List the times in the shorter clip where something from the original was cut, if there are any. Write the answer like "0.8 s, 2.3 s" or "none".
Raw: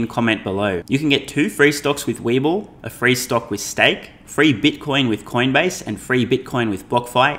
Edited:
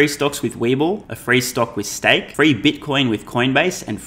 1.1 s, 2.3 s